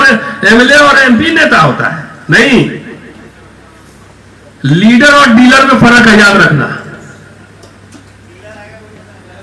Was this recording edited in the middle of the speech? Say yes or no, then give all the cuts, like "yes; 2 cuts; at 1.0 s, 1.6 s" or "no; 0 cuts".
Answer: no; 0 cuts